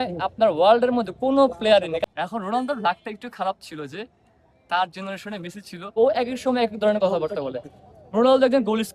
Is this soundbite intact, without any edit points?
no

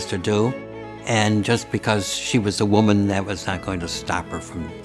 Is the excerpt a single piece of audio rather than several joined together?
yes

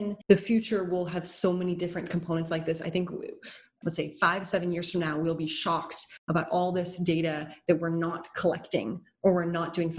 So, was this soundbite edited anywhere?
no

